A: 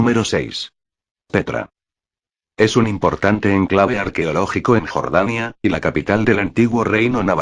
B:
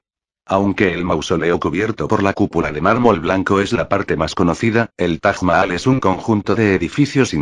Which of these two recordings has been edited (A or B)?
B